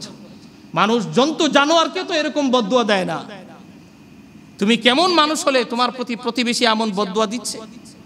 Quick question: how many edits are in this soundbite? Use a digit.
0